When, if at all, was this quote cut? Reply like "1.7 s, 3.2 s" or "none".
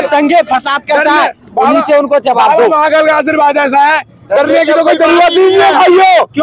none